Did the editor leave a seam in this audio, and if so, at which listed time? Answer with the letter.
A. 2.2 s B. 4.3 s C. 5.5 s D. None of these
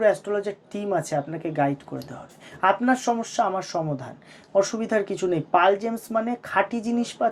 D